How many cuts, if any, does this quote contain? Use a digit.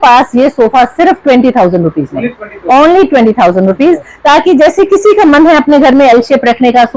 0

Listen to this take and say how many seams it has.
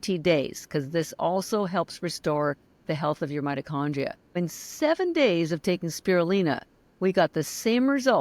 1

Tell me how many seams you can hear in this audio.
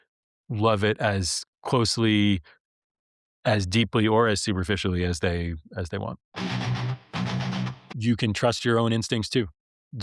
2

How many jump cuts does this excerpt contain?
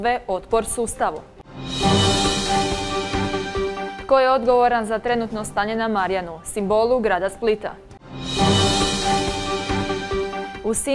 0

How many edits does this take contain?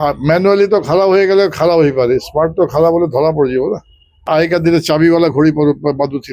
1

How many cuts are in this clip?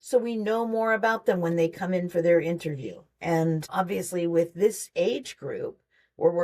1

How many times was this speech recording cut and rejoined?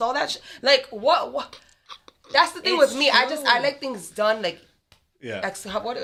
0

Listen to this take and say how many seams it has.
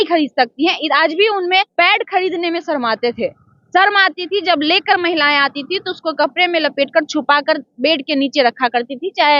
1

